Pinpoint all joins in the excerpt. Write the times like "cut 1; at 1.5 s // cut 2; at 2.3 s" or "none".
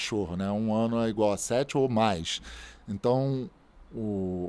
none